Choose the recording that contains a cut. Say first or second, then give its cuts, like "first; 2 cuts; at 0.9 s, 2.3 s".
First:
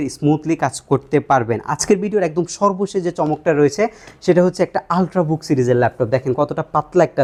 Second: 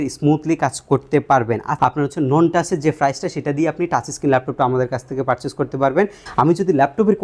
second; 2 cuts; at 1.7 s, 6.2 s